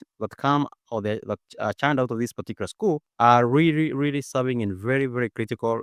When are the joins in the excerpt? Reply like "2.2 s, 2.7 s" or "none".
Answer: 3.1 s